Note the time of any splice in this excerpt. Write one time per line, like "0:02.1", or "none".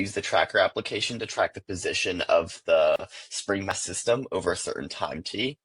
0:03.7